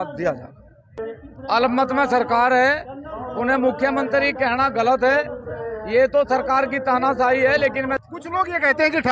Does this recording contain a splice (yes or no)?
yes